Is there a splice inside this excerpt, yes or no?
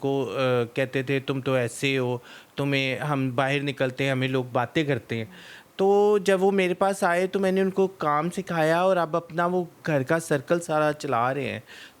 no